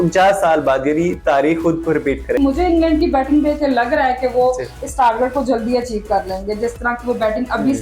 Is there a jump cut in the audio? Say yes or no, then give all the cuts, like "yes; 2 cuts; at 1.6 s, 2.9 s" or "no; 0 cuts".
yes; 1 cut; at 2.4 s